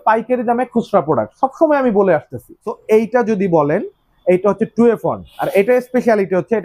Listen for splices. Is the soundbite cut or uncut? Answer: cut